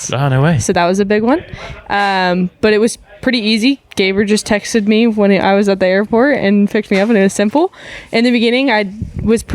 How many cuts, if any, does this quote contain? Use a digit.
0